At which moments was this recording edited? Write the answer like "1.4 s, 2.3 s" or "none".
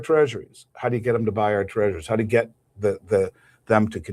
none